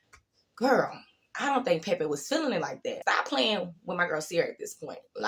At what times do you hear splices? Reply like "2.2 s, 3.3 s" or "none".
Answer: 3.0 s